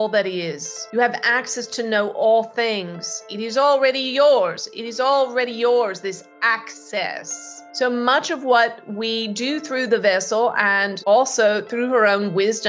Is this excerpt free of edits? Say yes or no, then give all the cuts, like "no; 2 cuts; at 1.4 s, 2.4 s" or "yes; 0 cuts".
no; 1 cut; at 3.2 s